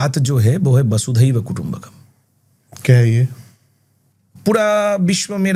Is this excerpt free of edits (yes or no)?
yes